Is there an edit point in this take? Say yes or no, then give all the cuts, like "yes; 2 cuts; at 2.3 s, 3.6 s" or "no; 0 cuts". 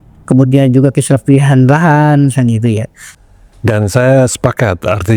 yes; 1 cut; at 3.0 s